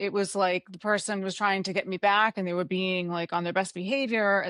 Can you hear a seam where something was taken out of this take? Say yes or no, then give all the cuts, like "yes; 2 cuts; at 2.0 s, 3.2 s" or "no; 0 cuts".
no; 0 cuts